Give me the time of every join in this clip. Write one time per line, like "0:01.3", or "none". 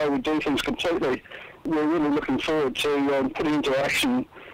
0:01.7